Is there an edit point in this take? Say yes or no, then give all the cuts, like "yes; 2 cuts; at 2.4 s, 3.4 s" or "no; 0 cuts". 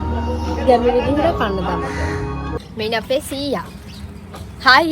yes; 1 cut; at 2.6 s